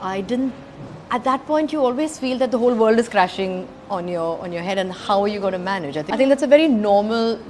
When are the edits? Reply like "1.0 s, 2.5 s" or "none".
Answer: 6.0 s